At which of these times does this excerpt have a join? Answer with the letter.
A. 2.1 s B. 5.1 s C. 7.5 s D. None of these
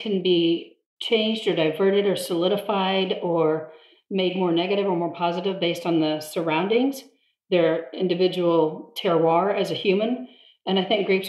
D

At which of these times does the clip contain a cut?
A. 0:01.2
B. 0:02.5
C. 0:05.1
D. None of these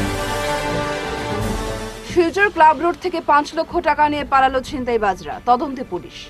A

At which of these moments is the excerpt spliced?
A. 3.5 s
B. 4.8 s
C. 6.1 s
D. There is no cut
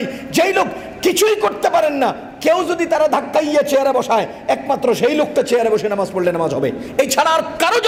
D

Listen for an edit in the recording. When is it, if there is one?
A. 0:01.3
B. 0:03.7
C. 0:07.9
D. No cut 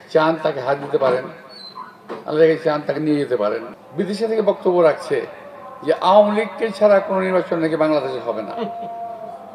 B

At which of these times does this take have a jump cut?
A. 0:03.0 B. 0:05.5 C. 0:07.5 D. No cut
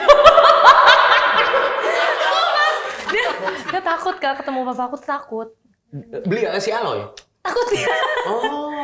A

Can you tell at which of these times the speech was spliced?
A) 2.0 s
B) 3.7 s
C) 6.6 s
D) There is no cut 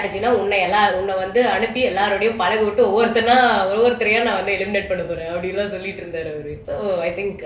C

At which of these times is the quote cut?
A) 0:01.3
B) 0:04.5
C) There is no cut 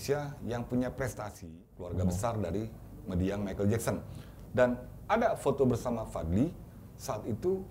A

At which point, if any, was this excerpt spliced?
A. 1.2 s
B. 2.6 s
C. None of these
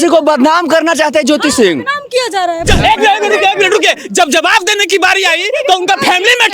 B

